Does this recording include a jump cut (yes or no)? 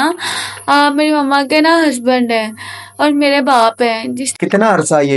yes